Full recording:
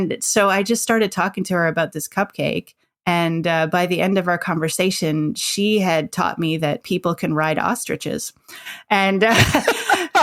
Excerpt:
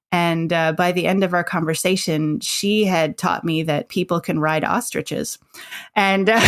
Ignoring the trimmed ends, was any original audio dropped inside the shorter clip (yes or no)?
no